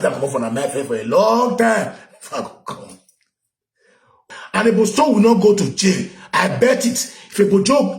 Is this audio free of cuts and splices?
no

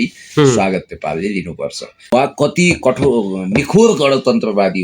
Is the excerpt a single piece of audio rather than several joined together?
no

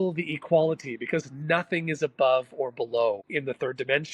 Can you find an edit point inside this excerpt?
yes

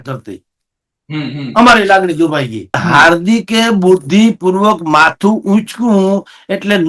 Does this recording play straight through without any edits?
no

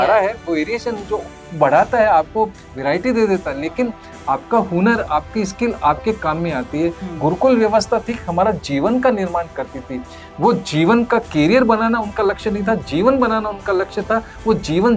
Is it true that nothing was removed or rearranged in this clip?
no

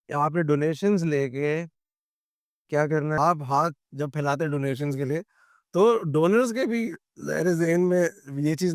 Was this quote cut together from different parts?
yes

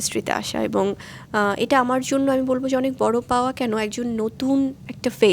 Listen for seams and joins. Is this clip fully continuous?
no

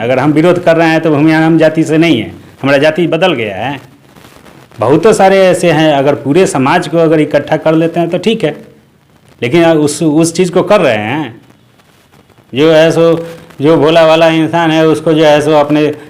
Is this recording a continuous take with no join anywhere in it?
yes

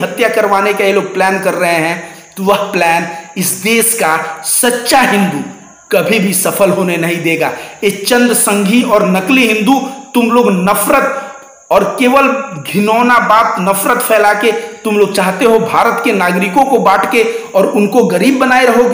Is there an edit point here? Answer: no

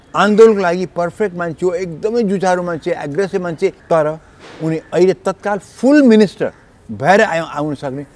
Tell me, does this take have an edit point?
yes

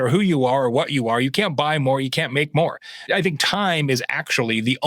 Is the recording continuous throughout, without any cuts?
no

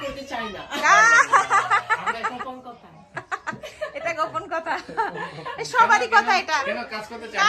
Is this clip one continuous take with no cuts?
yes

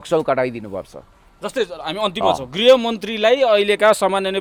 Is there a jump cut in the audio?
no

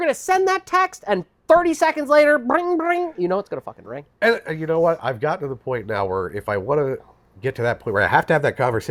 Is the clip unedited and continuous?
yes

